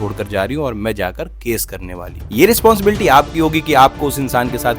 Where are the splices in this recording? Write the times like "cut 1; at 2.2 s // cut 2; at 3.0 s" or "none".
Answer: cut 1; at 2.2 s